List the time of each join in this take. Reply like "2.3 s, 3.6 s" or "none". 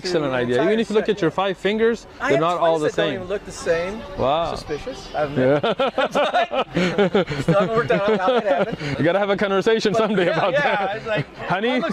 none